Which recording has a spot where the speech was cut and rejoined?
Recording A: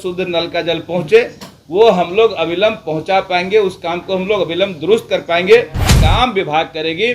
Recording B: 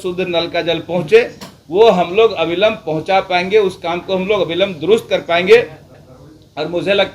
A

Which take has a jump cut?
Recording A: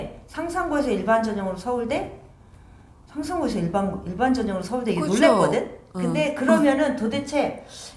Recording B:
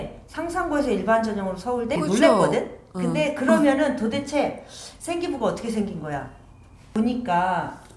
B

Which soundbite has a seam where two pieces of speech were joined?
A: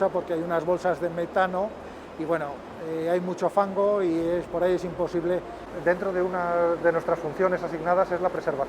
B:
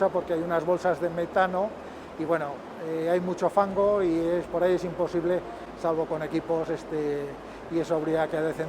A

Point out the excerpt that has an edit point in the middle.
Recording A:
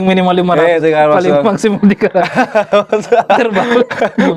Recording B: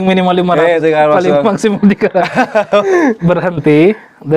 B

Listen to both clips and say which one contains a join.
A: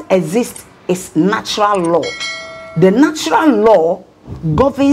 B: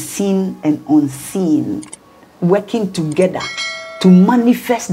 A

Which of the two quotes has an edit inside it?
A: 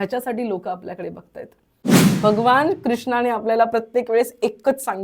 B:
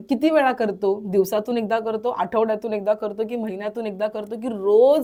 A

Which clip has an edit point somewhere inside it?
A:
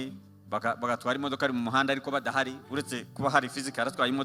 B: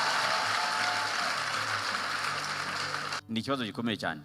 B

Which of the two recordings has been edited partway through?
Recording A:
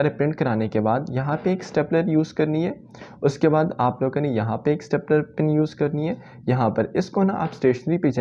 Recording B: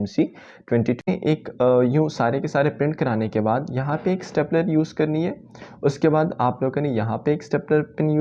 B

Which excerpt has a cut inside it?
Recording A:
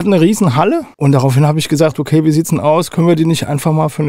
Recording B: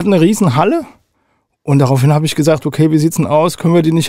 A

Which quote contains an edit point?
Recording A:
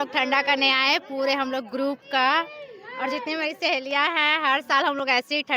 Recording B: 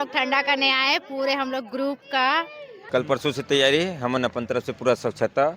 B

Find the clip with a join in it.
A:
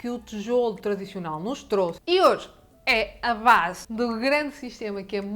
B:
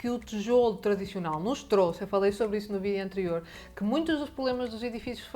A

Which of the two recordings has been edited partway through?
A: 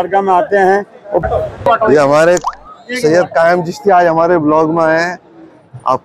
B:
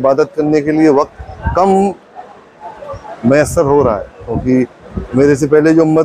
A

